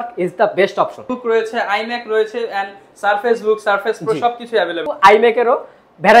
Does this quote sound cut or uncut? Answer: cut